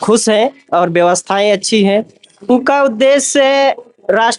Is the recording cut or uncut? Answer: cut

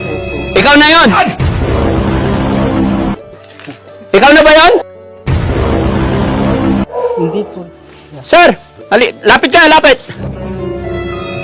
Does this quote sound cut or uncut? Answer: cut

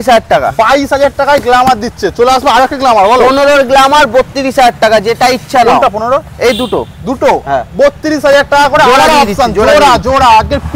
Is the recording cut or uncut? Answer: uncut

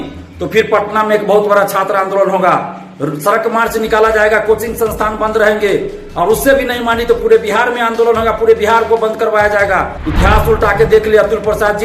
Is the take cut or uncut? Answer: cut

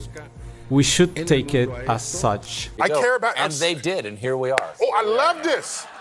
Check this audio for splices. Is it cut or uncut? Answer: cut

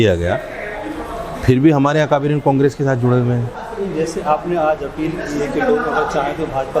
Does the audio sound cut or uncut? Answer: cut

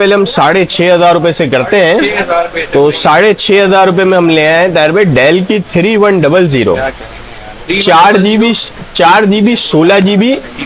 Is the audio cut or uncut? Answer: uncut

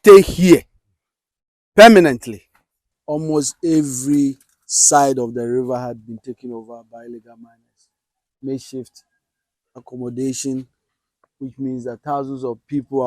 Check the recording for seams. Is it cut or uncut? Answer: cut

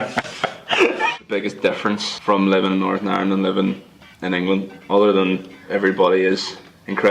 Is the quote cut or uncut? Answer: cut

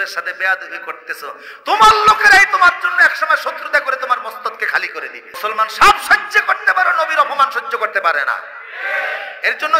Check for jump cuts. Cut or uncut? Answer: cut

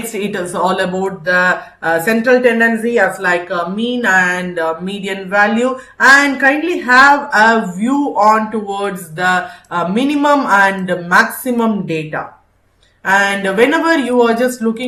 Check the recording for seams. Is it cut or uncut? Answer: uncut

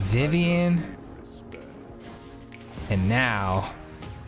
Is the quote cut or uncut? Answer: cut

